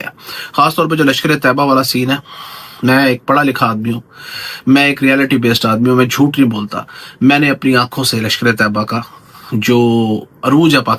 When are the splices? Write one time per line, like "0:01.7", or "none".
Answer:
none